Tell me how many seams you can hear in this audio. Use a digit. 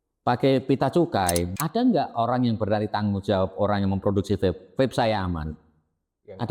1